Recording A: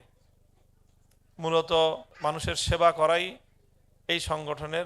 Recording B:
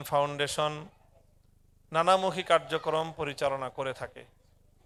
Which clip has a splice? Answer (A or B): A